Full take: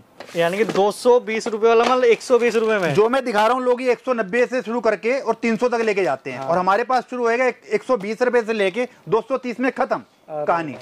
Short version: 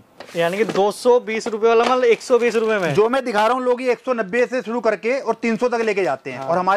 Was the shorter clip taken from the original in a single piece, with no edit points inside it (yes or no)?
yes